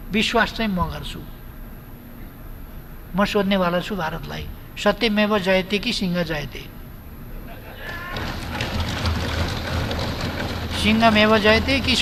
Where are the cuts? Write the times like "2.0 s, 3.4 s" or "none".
none